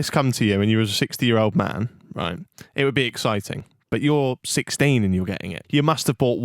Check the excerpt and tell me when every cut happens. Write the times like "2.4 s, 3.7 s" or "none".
5.5 s